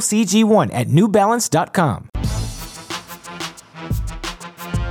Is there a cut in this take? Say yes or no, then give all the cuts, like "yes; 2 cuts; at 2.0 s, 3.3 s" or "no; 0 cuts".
yes; 2 cuts; at 2.1 s, 3.7 s